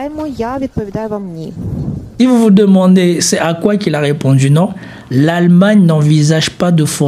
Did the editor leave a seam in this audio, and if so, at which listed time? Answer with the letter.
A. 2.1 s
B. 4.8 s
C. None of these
A